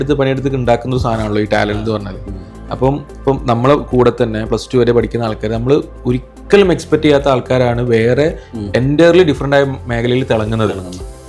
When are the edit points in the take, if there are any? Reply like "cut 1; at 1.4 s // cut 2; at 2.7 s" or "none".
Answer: none